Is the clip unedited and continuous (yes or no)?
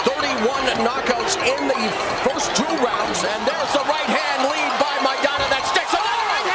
yes